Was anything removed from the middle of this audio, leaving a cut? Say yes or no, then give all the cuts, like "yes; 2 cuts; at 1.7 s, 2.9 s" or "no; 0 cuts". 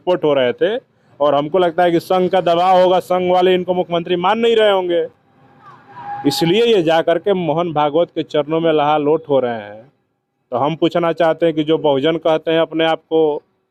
no; 0 cuts